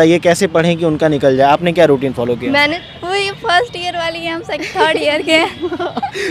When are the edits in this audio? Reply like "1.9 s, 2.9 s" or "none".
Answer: 2.8 s